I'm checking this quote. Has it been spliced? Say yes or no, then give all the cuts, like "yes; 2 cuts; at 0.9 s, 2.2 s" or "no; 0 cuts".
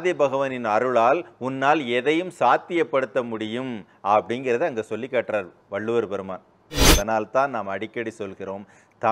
yes; 1 cut; at 6.8 s